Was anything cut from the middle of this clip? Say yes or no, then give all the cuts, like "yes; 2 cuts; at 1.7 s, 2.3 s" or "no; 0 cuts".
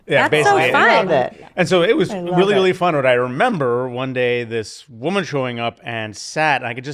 no; 0 cuts